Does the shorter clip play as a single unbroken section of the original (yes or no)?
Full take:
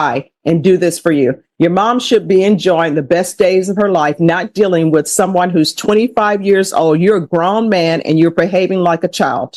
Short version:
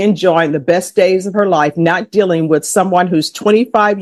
yes